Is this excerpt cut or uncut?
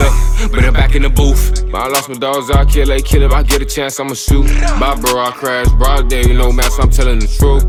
uncut